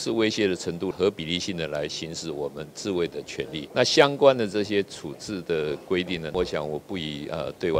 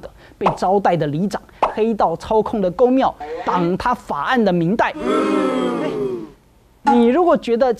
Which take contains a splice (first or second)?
first